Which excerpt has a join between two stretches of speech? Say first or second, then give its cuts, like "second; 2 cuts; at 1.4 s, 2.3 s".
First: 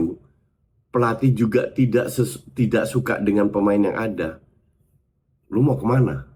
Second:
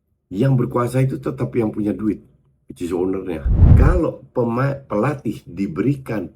second; 1 cut; at 3.7 s